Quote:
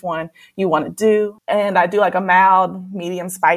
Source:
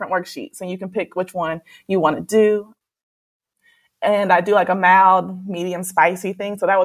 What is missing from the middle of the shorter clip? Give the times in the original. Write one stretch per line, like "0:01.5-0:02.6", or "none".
0:02.7-0:03.9